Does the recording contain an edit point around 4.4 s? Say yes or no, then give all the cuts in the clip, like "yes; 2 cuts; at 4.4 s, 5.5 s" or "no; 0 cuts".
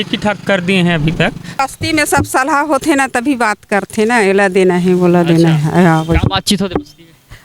no; 1 cut; at 1.6 s